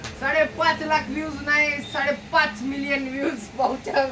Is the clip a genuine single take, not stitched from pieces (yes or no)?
yes